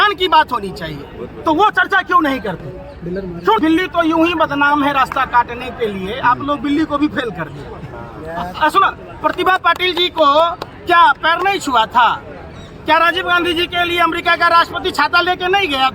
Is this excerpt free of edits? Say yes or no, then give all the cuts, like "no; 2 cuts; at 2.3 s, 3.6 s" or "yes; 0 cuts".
no; 1 cut; at 3.6 s